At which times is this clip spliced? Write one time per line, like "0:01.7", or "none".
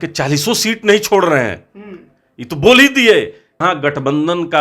0:03.6